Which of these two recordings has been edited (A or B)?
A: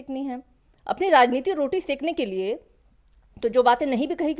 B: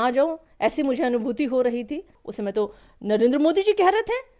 B